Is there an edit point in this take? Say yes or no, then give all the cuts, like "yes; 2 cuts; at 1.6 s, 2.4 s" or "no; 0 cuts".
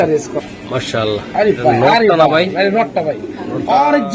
yes; 1 cut; at 2.9 s